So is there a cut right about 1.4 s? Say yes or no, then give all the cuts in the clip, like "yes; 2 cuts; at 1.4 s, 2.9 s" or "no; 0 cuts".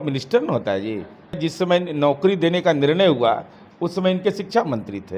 yes; 1 cut; at 1.4 s